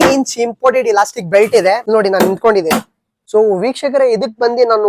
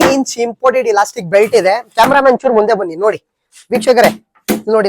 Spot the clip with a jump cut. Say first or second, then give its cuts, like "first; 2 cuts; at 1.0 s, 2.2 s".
first; 2 cuts; at 1.8 s, 3.3 s